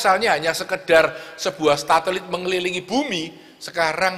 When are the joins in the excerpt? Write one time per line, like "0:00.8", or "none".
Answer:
none